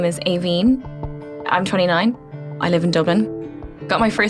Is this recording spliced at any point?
yes; 3 cuts; at 0.9 s, 2.2 s, 3.3 s

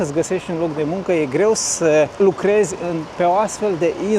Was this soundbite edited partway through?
no; 0 cuts

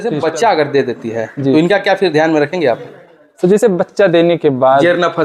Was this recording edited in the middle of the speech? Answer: no; 0 cuts

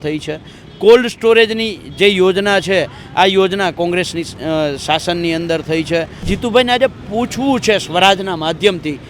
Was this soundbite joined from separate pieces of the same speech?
yes; 1 cut; at 6.3 s

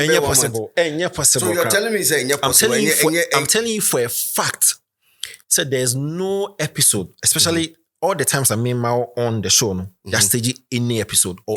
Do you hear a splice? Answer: no; 0 cuts

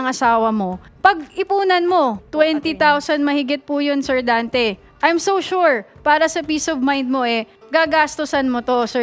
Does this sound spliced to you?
yes; 1 cut; at 2.2 s

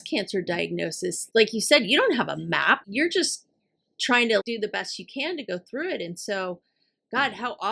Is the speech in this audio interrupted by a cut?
yes; 3 cuts; at 1.2 s, 2.8 s, 4.4 s

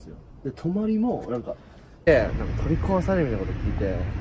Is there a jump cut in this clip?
yes; 1 cut; at 2.1 s

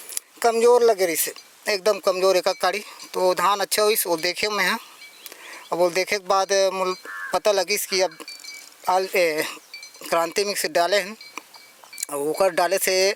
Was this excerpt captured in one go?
yes; 0 cuts

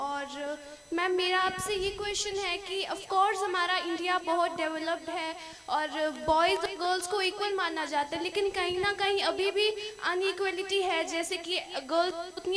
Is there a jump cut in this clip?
no; 0 cuts

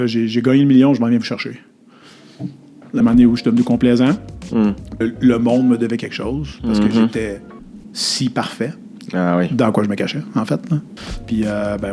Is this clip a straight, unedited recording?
no; 3 cuts; at 3.0 s, 5.0 s, 10.9 s

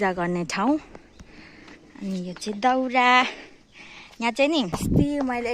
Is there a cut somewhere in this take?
no; 0 cuts

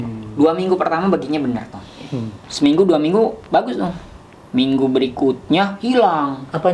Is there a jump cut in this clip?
yes; 1 cut; at 2.4 s

